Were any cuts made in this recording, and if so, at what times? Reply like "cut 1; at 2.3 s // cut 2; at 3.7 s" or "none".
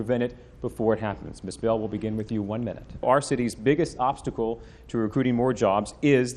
cut 1; at 3.0 s

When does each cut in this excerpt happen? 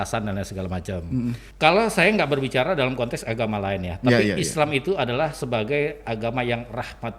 cut 1; at 1.5 s

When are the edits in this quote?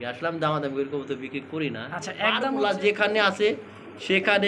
cut 1; at 2.5 s

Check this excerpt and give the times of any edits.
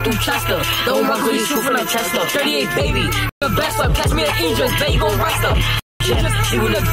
none

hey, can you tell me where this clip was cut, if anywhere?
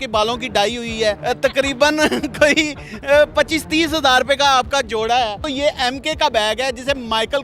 cut 1; at 1.2 s // cut 2; at 5.4 s

